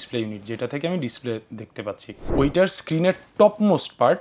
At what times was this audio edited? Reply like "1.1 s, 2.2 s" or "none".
2.1 s

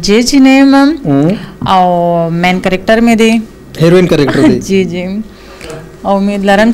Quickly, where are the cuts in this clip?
none

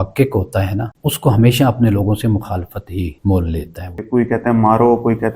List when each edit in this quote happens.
0.9 s, 3.1 s, 4.1 s

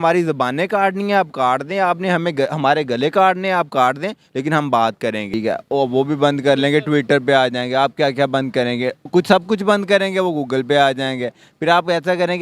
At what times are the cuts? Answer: 5.3 s, 9.0 s

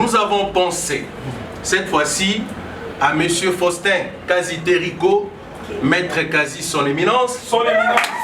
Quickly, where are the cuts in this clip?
none

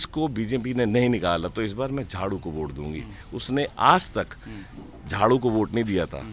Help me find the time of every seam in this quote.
none

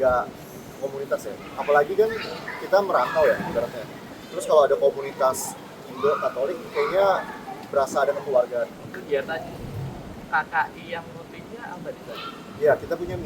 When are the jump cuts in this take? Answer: 8.7 s

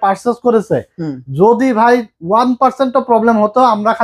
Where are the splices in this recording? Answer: none

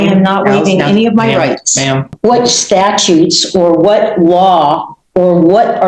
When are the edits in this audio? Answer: 2.1 s

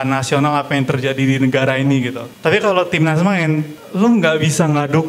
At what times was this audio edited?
2.2 s, 3.8 s

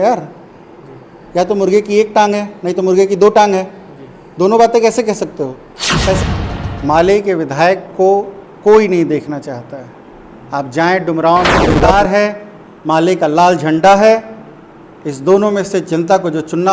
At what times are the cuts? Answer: 6.2 s, 11.9 s

